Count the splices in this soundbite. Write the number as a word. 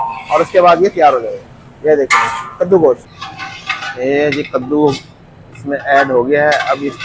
one